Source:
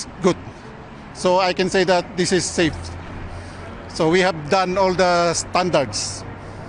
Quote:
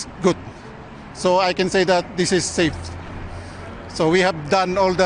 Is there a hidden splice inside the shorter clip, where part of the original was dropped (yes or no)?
no